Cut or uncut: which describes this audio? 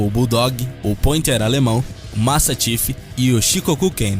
cut